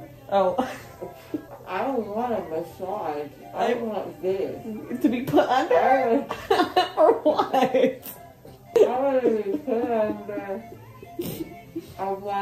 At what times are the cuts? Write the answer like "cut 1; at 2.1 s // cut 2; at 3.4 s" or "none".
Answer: cut 1; at 1.5 s // cut 2; at 8.8 s